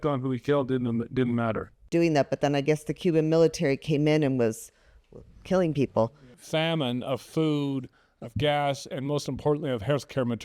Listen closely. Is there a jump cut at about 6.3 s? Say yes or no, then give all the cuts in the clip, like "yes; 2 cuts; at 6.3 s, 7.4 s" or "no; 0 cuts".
yes; 2 cuts; at 1.9 s, 6.3 s